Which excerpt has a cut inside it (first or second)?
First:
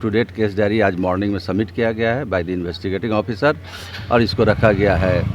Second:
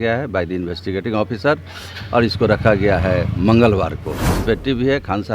second